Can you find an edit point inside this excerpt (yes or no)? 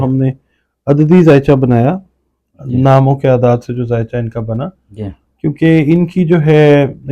no